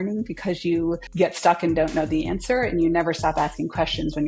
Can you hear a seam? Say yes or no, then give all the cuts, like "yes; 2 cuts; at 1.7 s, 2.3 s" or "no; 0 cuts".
yes; 1 cut; at 1.1 s